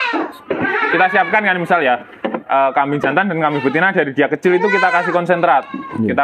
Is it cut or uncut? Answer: uncut